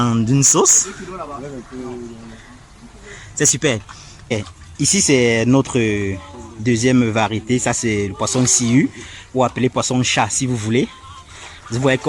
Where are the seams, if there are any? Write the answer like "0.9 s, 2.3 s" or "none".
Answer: 4.3 s

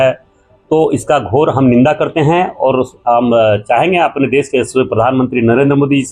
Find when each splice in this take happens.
none

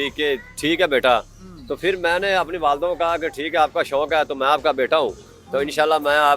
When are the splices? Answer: none

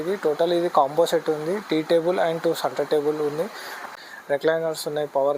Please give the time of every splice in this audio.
3.7 s

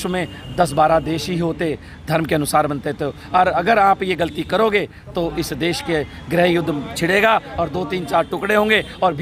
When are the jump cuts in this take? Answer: none

